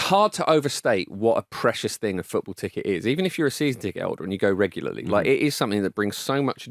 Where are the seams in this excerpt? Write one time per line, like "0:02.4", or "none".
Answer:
none